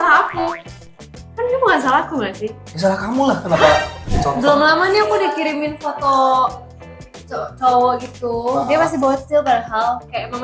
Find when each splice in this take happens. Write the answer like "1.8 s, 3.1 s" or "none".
4.0 s